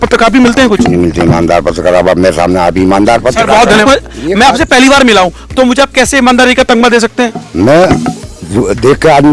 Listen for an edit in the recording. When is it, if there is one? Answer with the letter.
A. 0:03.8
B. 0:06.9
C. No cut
A